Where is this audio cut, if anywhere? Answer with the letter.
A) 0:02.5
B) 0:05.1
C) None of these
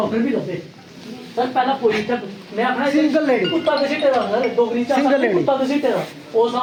C